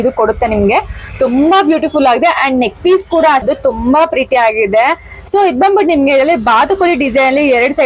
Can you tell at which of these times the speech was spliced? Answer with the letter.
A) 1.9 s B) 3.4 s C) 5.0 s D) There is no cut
B